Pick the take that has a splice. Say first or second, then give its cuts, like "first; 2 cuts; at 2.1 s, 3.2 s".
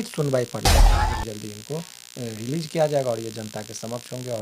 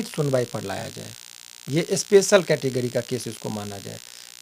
first; 1 cut; at 0.9 s